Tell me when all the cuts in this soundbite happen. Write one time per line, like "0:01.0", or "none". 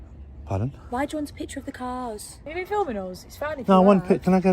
0:02.3